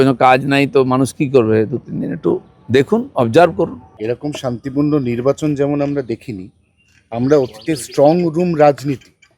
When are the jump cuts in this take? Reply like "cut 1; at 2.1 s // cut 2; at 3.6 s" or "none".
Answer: cut 1; at 3.9 s